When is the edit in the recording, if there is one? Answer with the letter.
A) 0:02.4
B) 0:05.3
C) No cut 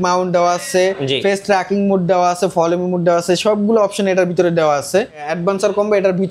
B